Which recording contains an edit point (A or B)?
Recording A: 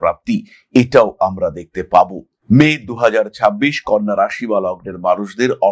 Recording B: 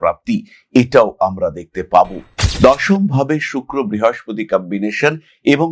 B